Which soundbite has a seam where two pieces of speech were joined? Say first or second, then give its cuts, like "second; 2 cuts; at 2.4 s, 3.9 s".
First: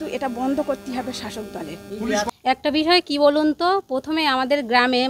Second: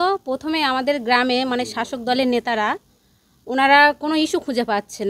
first; 1 cut; at 2.3 s